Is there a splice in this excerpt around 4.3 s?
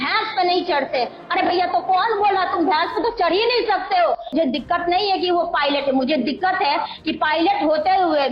yes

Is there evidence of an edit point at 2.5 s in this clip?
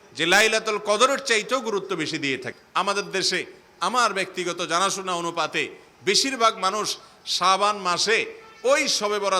yes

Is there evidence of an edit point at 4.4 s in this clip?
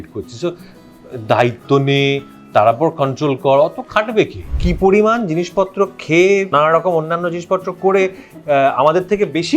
yes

